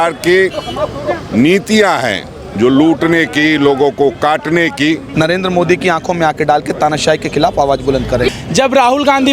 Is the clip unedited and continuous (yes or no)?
no